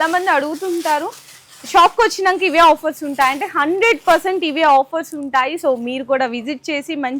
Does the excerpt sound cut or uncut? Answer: uncut